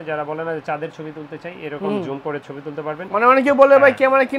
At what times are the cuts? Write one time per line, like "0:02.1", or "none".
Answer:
0:03.0